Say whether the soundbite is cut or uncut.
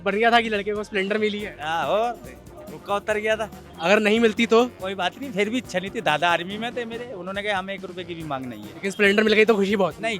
cut